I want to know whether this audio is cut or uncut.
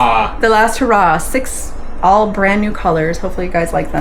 uncut